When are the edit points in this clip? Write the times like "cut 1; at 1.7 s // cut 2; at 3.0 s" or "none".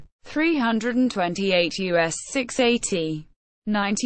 none